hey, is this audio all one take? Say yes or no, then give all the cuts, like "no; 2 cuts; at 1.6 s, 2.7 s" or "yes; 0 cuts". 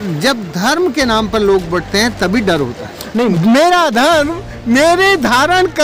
no; 1 cut; at 3.3 s